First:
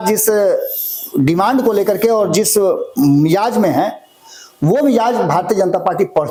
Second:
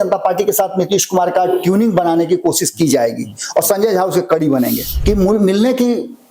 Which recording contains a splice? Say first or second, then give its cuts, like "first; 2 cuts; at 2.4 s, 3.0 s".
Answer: second; 1 cut; at 4.9 s